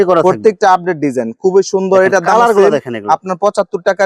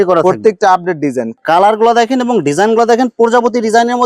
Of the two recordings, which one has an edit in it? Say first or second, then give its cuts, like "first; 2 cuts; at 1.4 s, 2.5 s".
second; 1 cut; at 1.4 s